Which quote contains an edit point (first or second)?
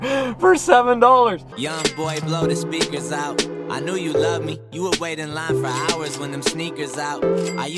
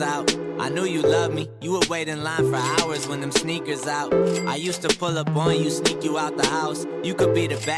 first